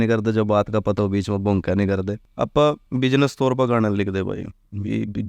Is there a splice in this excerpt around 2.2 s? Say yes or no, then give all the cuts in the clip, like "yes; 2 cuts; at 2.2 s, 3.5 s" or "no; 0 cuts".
yes; 1 cut; at 2.2 s